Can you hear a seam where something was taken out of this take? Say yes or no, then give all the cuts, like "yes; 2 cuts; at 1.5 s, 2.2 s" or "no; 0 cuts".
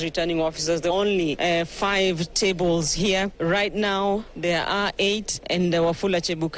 yes; 1 cut; at 0.9 s